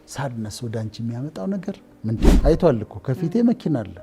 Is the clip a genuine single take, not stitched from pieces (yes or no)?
no